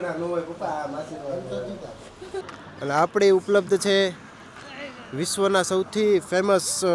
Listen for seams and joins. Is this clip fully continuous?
no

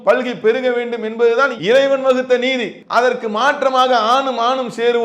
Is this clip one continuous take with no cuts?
no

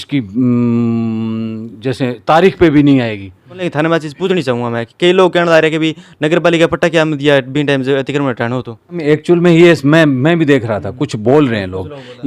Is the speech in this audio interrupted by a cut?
yes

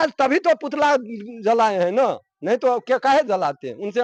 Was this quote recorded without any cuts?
yes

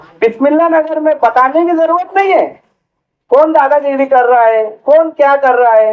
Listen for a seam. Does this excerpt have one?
no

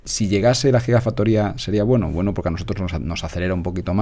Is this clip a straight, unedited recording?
yes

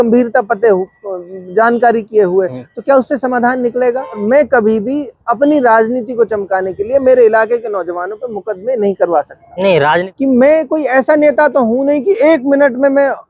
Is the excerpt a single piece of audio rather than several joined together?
no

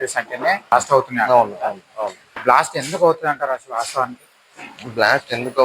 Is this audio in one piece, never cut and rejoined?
no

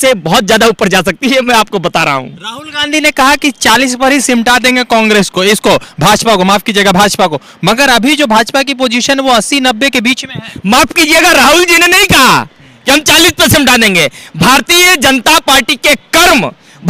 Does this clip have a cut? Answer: no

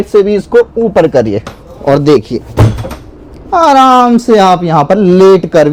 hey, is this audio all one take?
yes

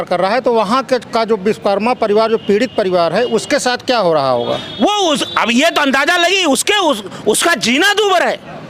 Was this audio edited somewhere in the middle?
no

